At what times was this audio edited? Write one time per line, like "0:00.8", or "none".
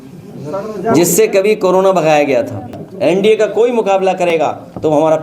0:02.8